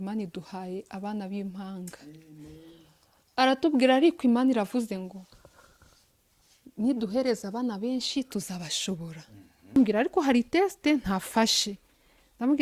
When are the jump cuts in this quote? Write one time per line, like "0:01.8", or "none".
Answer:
0:09.8